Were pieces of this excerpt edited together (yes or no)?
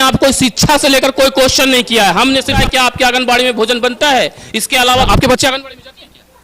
yes